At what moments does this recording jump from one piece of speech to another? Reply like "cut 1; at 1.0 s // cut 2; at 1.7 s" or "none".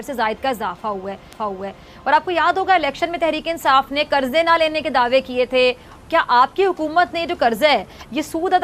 none